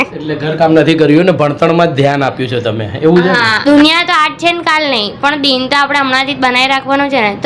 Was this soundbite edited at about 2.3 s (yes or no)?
no